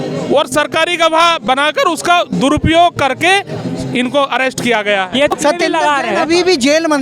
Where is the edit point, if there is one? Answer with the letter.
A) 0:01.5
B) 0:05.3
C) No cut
B